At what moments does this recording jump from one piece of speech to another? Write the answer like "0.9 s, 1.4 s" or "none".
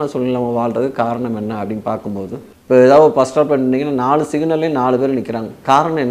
2.5 s